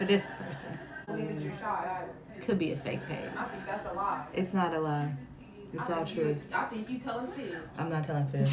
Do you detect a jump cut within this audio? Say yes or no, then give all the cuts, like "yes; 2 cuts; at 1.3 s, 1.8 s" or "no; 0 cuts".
yes; 1 cut; at 1.1 s